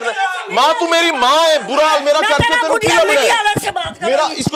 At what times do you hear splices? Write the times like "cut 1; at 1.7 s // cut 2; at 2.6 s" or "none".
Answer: none